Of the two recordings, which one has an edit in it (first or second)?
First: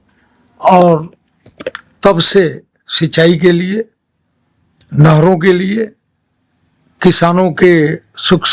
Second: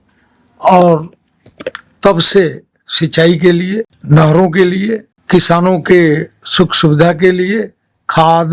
second